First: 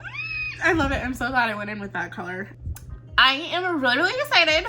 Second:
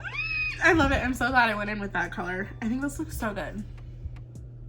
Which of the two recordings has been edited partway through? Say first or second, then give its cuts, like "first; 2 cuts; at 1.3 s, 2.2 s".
first; 1 cut; at 2.5 s